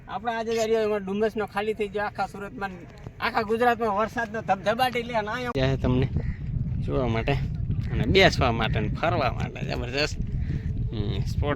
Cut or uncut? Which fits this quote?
cut